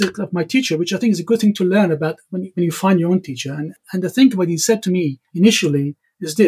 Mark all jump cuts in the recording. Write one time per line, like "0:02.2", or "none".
0:03.8
0:05.2